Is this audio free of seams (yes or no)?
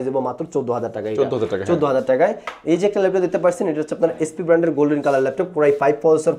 yes